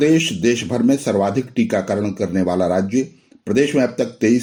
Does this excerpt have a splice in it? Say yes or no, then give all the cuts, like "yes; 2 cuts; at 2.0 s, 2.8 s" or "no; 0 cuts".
no; 0 cuts